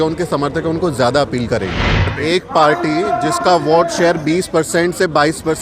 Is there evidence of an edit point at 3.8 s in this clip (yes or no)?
no